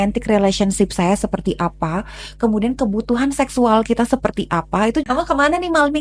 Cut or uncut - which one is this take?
cut